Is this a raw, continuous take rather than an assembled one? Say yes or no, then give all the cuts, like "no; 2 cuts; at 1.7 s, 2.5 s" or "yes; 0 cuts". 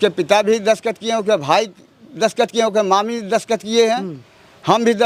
yes; 0 cuts